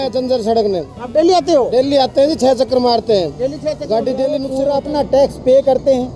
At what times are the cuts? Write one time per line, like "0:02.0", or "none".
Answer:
0:04.5